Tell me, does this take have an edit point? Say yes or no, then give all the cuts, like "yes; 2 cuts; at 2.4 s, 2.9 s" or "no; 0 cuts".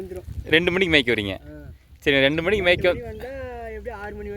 no; 0 cuts